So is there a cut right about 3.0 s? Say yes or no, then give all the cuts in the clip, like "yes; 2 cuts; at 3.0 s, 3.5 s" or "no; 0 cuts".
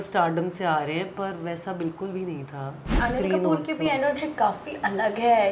yes; 1 cut; at 3.0 s